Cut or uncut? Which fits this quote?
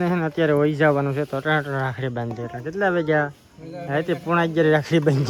uncut